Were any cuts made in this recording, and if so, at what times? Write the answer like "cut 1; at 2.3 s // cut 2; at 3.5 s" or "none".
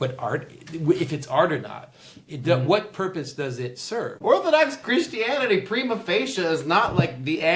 cut 1; at 4.2 s